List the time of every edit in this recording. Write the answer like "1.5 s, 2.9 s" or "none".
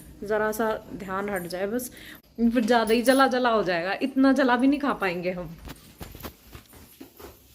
2.0 s

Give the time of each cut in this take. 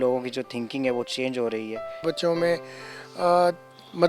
2.0 s

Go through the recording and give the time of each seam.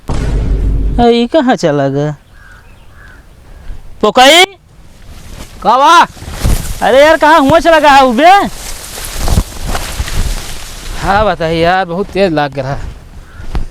0.9 s

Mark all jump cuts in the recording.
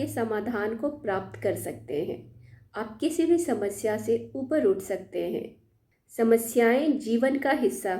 5.7 s

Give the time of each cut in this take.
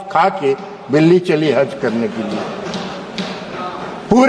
none

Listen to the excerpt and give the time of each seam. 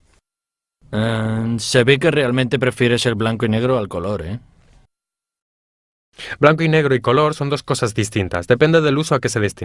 2.1 s

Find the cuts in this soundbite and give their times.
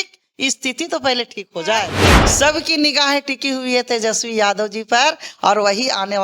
2.0 s

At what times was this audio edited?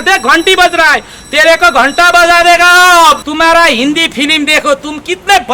3.2 s

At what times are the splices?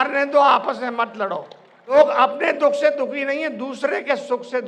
1.9 s

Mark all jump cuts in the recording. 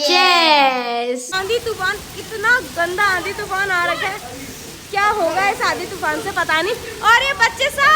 1.3 s

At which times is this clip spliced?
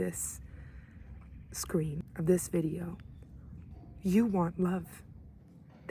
2.0 s

